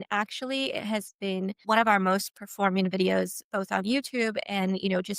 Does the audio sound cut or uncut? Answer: cut